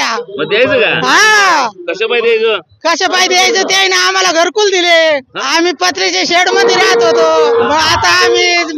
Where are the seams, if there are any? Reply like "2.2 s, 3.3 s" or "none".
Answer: 5.3 s, 7.7 s